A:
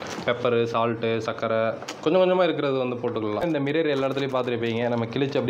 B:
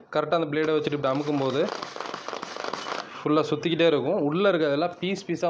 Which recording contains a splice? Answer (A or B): A